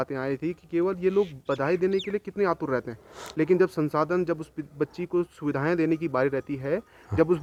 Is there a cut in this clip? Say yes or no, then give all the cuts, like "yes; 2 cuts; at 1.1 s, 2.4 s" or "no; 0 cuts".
no; 0 cuts